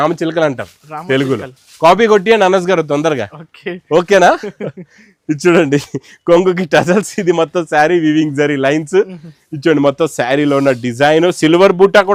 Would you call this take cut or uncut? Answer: uncut